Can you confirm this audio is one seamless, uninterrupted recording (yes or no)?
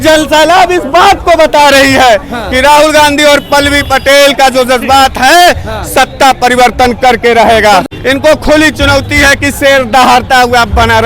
no